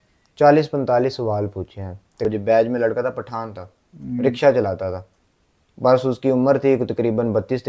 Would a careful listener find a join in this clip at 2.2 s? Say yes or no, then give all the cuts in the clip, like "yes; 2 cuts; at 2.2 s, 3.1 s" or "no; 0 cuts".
yes; 1 cut; at 2.2 s